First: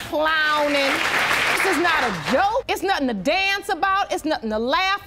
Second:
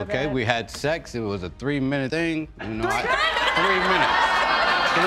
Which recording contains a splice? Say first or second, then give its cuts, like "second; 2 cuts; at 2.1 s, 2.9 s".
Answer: second; 1 cut; at 2.1 s